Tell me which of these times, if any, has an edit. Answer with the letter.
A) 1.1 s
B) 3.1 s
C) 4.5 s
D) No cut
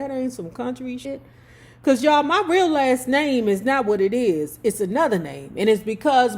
A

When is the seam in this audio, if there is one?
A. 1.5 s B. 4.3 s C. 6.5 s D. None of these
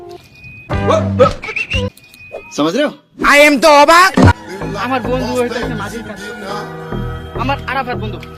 B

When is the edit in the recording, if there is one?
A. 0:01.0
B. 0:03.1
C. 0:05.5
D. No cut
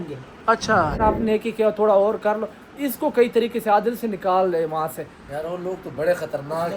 A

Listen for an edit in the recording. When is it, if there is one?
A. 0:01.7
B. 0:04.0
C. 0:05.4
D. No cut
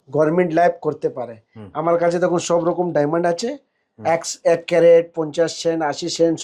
D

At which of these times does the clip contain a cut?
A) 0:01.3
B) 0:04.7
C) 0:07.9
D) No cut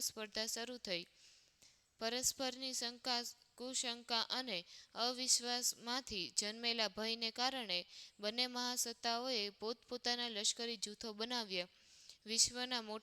D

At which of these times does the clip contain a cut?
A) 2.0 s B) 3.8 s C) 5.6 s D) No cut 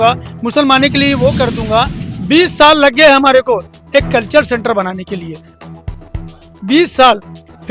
A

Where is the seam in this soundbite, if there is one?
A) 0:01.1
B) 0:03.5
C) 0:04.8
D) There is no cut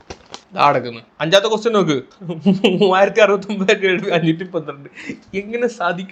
A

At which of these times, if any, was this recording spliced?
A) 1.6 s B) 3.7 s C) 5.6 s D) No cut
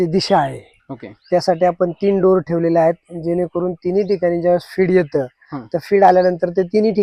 D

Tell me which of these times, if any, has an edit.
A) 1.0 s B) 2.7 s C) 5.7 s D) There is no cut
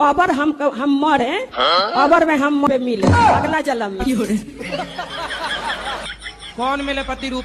B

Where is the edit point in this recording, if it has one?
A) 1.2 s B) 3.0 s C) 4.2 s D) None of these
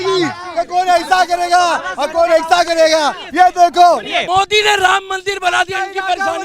C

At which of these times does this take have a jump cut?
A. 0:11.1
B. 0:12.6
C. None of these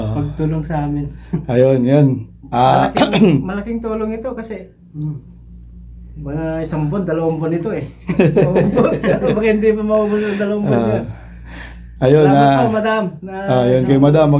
C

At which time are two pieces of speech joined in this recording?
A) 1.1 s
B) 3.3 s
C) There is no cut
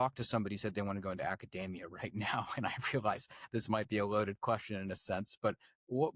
C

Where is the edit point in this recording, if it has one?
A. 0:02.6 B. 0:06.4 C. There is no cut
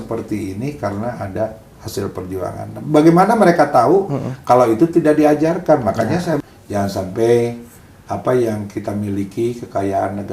B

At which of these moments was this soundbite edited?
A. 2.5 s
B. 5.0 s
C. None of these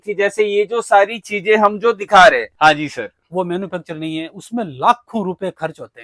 A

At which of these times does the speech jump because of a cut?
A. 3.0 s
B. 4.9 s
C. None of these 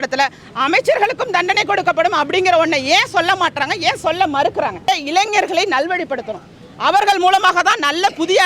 B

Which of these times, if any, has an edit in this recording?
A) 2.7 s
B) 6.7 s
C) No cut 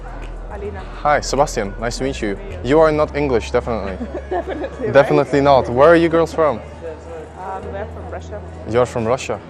B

